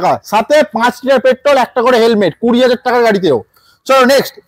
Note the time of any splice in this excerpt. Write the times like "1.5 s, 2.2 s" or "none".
none